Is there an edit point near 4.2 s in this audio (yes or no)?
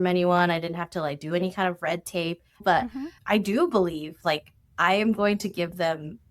no